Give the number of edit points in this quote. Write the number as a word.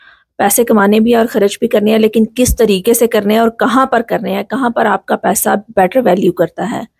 zero